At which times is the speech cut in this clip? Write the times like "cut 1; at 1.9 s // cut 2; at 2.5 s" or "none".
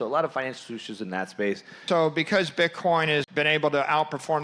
cut 1; at 1.8 s // cut 2; at 3.3 s